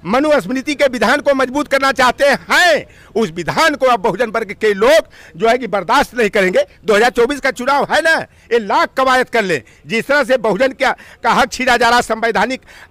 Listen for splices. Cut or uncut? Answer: uncut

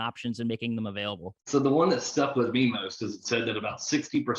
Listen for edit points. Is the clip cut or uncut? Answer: cut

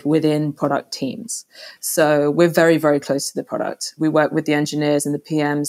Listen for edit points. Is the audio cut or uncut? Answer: cut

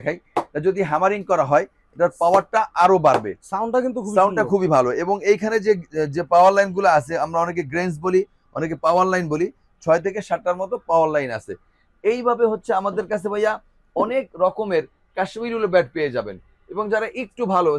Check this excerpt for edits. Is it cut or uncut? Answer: uncut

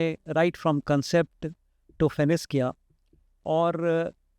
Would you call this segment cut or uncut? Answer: uncut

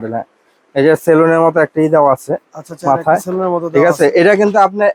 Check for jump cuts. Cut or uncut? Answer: uncut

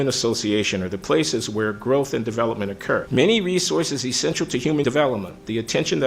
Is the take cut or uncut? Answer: cut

